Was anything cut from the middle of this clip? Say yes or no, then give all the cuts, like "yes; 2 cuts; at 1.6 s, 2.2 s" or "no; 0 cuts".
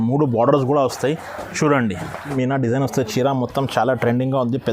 yes; 1 cut; at 2.3 s